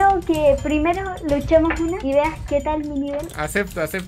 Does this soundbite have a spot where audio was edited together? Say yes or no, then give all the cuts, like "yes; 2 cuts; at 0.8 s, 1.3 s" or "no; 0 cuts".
yes; 2 cuts; at 2.0 s, 3.3 s